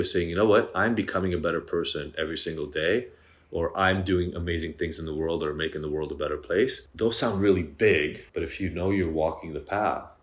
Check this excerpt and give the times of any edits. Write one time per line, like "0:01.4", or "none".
0:06.8
0:08.2